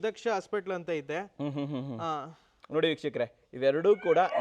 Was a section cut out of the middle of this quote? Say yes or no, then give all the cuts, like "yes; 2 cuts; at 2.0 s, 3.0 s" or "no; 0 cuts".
no; 0 cuts